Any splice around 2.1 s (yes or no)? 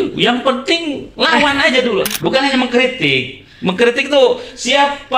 yes